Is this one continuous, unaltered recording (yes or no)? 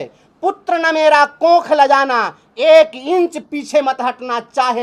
yes